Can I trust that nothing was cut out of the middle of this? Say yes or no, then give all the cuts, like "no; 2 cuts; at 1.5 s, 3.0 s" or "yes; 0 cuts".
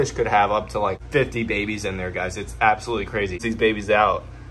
no; 2 cuts; at 1.0 s, 3.4 s